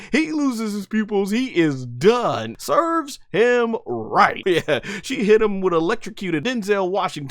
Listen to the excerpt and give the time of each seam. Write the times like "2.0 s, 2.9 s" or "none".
2.5 s, 4.4 s, 6.4 s